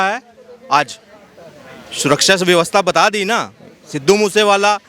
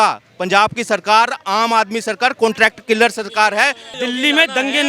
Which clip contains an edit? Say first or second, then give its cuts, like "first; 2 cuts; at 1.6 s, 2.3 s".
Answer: second; 1 cut; at 3.9 s